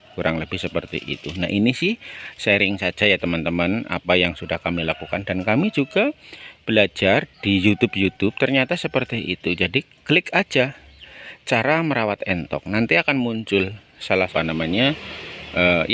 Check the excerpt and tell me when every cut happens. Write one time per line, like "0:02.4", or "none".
0:14.3

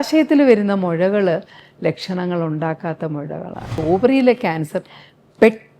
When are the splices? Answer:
0:03.8

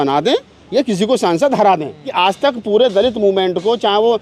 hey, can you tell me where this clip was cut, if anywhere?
0:02.1

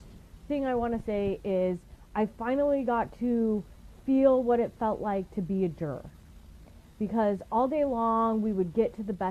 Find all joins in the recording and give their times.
none

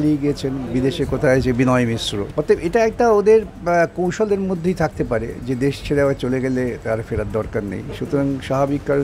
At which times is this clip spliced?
0:02.2

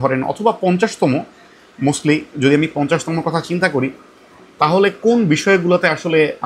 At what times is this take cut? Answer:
none

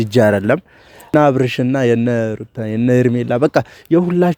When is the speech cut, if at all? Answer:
0:01.1

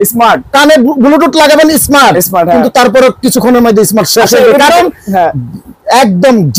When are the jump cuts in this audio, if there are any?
none

